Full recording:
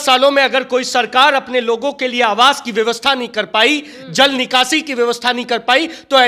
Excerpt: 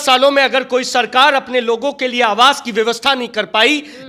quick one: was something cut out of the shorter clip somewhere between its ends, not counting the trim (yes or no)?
no